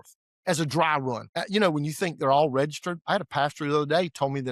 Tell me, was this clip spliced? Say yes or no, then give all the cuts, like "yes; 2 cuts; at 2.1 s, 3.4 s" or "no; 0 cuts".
yes; 1 cut; at 1.3 s